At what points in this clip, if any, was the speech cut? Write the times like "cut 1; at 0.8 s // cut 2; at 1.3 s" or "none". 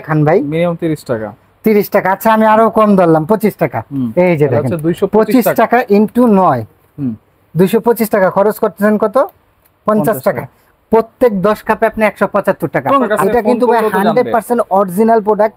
cut 1; at 4.0 s // cut 2; at 13.1 s